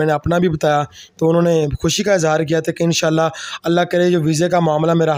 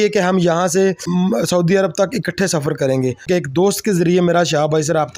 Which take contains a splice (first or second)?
second